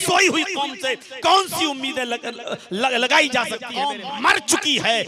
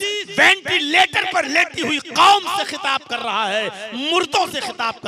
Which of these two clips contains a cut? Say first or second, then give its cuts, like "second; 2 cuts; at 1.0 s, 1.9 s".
first; 1 cut; at 3.6 s